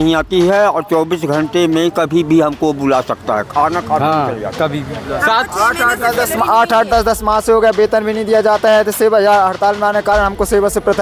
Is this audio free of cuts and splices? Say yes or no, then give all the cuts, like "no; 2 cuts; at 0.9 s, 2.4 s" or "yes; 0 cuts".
yes; 0 cuts